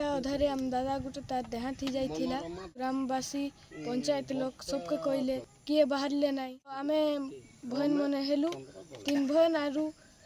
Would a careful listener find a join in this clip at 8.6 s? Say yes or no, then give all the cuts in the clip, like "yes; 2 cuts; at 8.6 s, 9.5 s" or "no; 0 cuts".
no; 3 cuts; at 2.8 s, 5.5 s, 6.8 s